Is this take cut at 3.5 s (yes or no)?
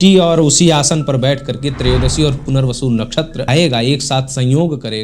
yes